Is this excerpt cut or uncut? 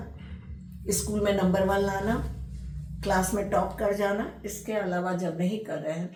uncut